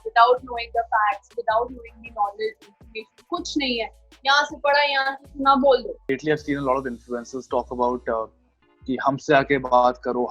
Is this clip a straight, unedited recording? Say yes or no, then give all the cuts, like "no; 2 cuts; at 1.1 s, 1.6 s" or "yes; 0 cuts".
no; 1 cut; at 6.1 s